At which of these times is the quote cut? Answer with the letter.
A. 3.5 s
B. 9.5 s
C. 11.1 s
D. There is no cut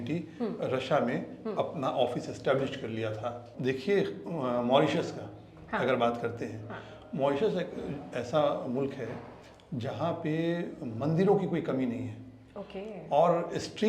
A